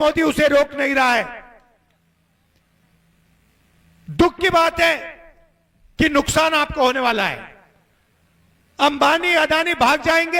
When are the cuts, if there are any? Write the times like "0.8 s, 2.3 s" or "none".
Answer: none